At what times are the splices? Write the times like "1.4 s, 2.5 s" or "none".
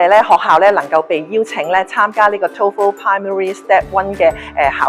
none